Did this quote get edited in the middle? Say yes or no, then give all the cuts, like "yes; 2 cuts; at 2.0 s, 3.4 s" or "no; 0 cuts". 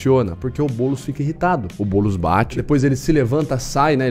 yes; 2 cuts; at 1.7 s, 2.6 s